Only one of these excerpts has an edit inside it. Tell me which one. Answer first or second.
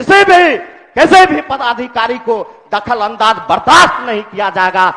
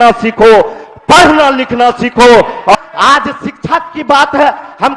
second